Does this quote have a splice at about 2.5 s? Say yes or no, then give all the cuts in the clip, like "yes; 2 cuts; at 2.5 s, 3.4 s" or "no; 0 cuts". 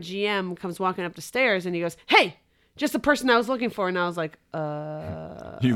no; 0 cuts